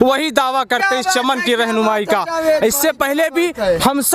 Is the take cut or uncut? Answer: uncut